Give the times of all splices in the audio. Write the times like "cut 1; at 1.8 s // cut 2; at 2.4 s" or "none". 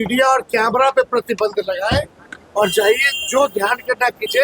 none